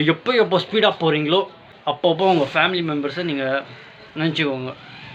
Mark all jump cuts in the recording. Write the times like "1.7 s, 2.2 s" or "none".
1.6 s